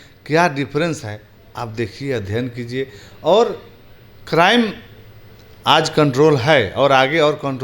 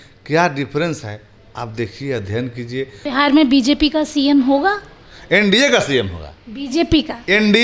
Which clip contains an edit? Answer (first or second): second